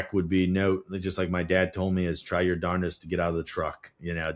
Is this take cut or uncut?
uncut